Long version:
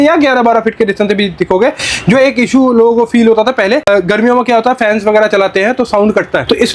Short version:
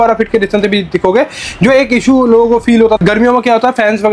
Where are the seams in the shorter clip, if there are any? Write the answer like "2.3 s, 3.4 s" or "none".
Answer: 3.0 s